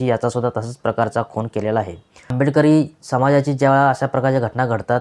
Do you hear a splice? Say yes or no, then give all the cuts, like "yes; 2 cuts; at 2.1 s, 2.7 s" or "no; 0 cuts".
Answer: yes; 1 cut; at 2.2 s